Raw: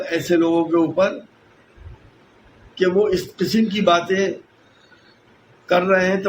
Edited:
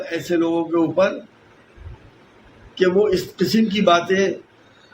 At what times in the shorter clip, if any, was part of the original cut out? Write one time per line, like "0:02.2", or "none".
none